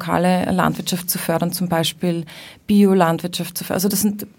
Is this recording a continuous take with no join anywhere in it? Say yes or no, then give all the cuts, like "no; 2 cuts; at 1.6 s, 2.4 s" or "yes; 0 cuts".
yes; 0 cuts